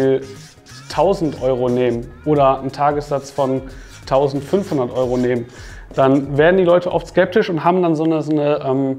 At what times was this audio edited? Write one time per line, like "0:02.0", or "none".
none